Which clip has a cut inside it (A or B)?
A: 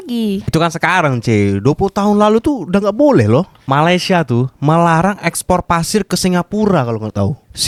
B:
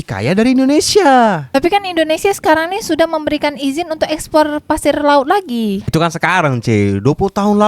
B